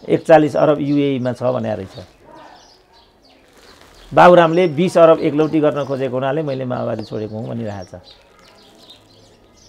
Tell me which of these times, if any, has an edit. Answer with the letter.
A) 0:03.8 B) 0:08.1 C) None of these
C